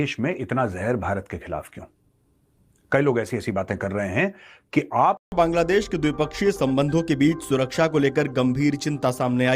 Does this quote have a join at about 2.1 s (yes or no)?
no